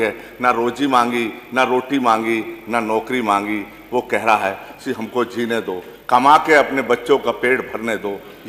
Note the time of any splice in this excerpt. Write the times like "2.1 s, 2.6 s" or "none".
none